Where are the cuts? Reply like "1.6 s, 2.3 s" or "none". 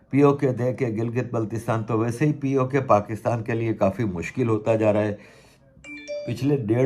none